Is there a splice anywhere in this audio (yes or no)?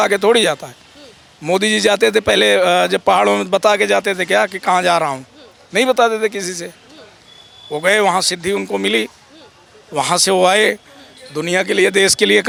no